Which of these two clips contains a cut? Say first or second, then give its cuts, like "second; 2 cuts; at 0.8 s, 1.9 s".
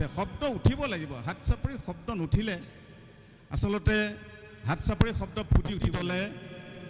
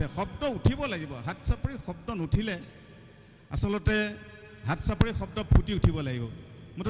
first; 1 cut; at 6.0 s